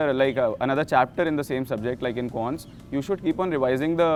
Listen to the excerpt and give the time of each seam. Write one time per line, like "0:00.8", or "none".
none